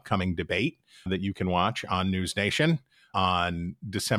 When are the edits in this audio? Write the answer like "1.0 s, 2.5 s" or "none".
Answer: 1.1 s, 3.1 s